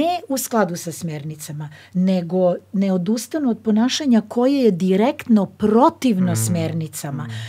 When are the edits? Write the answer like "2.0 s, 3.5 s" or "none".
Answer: none